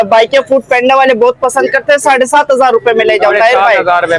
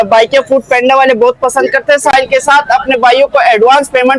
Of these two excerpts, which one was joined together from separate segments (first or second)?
second